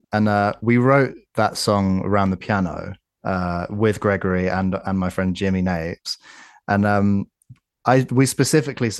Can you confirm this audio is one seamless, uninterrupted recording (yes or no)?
no